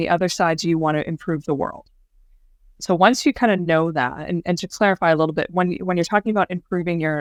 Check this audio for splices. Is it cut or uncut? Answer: uncut